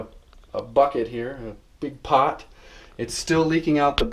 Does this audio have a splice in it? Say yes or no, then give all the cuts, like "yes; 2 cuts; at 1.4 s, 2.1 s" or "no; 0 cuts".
no; 0 cuts